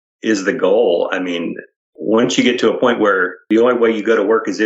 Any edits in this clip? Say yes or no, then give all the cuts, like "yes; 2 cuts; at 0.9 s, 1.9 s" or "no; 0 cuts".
yes; 2 cuts; at 1.9 s, 3.4 s